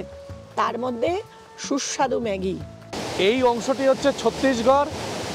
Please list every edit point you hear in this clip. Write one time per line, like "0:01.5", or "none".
0:02.9